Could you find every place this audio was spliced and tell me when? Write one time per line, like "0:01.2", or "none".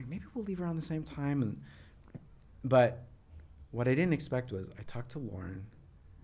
none